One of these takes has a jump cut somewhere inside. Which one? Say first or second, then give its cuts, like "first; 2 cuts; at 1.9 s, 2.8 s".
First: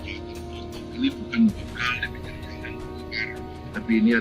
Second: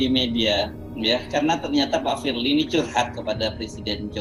first; 1 cut; at 1.0 s